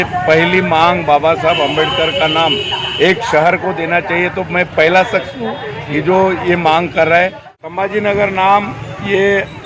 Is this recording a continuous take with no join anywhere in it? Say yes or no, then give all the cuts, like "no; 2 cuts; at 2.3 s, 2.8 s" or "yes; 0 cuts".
no; 1 cut; at 7.5 s